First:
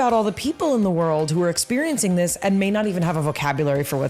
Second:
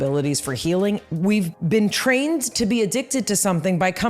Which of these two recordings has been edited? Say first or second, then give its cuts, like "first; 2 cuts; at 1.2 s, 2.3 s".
second; 1 cut; at 1.2 s